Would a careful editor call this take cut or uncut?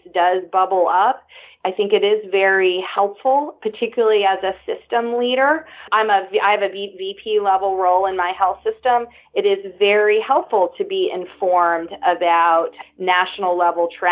cut